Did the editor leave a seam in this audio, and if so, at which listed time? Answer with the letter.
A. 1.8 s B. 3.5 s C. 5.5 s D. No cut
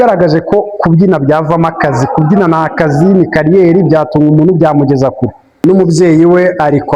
C